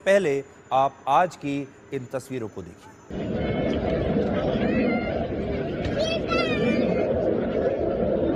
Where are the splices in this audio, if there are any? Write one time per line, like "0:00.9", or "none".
0:03.1